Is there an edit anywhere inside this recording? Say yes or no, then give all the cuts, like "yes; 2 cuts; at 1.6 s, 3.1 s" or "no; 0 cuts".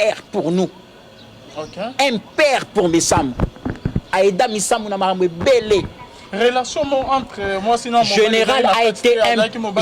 no; 0 cuts